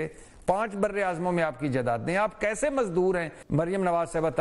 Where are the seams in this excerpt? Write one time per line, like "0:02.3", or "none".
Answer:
0:03.4